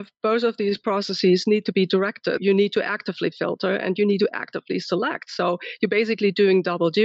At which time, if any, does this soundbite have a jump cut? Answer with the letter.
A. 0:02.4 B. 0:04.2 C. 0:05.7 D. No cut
A